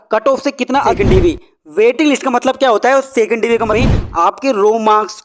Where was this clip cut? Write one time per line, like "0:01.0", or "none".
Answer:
0:00.9
0:03.7